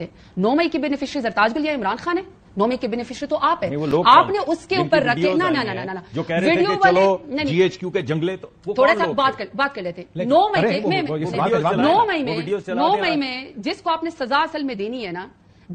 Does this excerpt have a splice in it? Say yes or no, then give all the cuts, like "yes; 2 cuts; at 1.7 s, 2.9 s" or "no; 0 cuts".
no; 0 cuts